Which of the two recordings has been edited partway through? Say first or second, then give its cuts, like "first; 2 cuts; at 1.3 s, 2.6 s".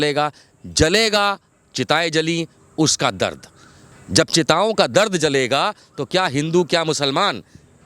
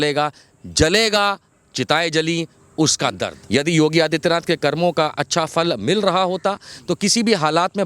second; 1 cut; at 3.3 s